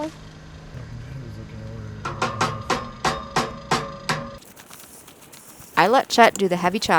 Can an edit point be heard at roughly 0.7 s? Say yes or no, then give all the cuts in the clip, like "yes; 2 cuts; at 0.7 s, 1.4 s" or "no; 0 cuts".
yes; 2 cuts; at 0.7 s, 4.4 s